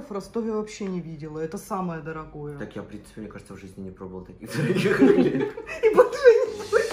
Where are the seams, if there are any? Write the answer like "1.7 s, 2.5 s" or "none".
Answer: none